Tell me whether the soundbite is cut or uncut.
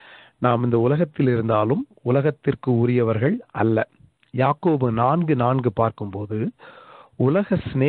uncut